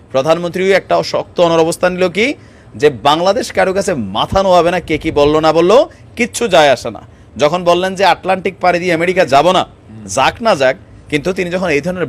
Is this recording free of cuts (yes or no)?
yes